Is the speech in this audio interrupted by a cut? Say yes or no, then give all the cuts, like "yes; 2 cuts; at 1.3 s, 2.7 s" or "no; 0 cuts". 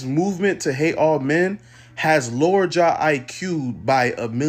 no; 0 cuts